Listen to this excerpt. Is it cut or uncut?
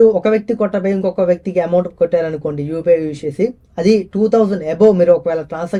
uncut